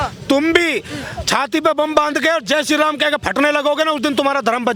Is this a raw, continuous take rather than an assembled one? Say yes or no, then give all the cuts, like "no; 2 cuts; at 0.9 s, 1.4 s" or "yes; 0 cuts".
yes; 0 cuts